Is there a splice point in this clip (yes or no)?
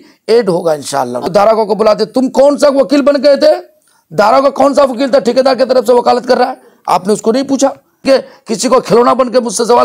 yes